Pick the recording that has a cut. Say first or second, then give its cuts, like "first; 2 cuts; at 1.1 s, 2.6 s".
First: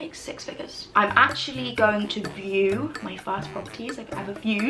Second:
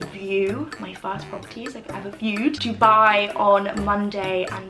first; 1 cut; at 0.9 s